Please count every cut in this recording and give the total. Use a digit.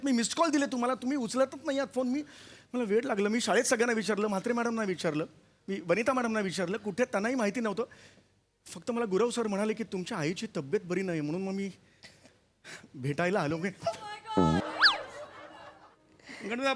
1